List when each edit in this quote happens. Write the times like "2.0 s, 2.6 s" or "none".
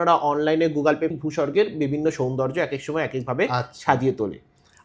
1.1 s